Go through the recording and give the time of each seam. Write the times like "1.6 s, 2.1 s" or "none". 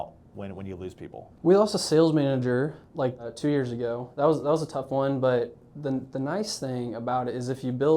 1.2 s, 3.0 s